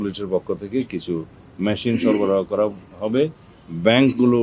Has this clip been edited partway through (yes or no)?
no